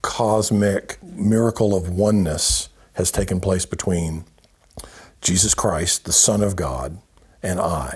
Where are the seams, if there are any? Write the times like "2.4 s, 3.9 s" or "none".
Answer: 1.1 s